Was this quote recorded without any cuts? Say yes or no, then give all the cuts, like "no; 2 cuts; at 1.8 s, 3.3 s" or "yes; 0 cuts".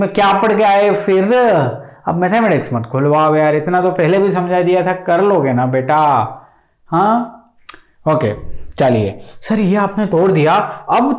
yes; 0 cuts